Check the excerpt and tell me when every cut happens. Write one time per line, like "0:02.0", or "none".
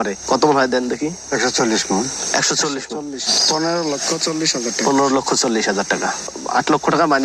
0:03.2